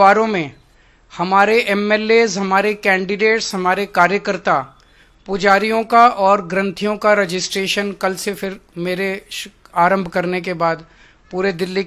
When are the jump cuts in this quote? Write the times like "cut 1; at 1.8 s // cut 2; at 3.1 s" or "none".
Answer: none